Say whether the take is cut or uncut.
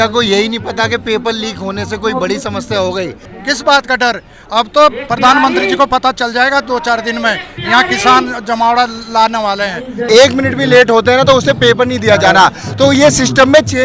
cut